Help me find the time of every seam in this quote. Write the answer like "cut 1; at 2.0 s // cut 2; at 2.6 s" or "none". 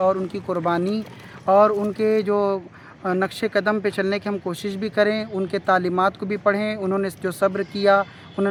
none